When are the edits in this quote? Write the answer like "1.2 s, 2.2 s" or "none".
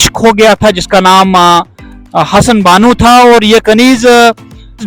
none

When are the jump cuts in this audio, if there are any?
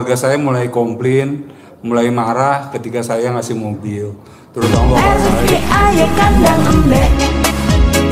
5.0 s

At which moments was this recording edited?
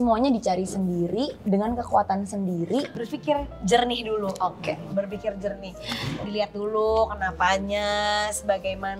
3.0 s

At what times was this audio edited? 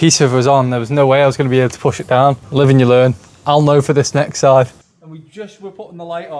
4.7 s

